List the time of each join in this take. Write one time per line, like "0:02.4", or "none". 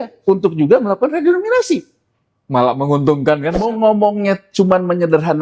0:03.6